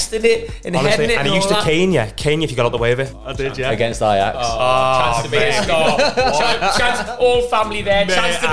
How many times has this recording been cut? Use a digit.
1